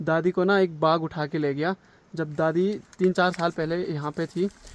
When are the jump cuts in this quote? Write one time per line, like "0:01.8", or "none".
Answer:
none